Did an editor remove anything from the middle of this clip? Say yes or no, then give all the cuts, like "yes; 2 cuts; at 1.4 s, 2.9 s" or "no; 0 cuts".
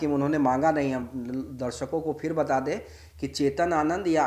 no; 0 cuts